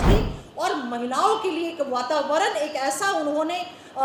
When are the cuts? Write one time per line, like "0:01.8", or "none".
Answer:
none